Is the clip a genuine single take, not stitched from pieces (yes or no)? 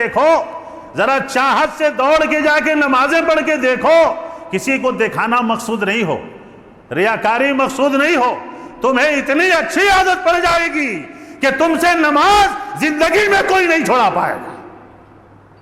yes